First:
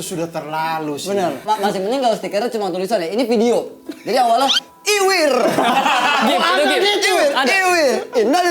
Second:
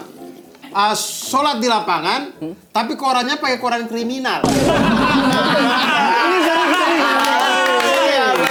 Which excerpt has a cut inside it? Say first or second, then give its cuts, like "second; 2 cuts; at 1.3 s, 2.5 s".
first; 1 cut; at 1.4 s